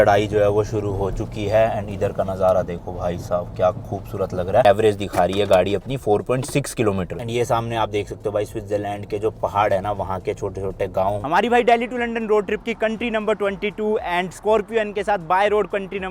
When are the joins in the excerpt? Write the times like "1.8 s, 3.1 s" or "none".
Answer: 4.7 s, 7.1 s, 11.2 s